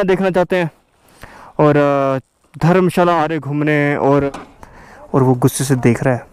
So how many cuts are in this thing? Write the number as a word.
one